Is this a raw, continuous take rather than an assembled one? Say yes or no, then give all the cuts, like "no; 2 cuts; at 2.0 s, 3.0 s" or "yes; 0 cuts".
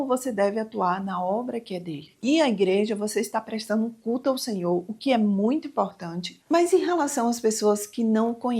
no; 1 cut; at 2.0 s